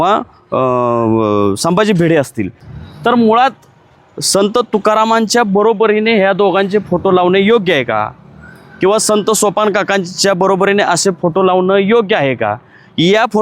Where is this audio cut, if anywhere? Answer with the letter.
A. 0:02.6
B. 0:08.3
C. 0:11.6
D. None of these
A